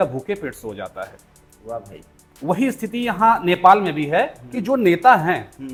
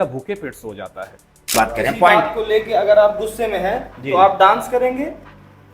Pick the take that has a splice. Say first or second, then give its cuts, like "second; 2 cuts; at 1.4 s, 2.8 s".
second; 1 cut; at 1.5 s